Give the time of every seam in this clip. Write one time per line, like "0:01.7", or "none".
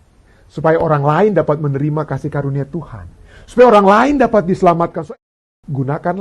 0:05.0